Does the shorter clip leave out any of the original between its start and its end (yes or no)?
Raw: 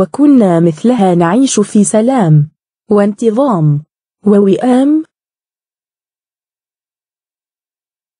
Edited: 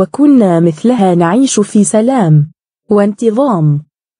no